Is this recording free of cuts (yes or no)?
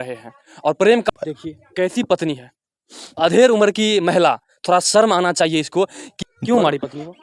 no